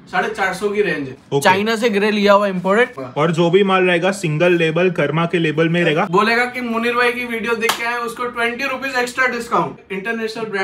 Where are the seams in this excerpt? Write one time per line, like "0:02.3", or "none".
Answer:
0:01.2
0:03.0
0:06.1
0:09.8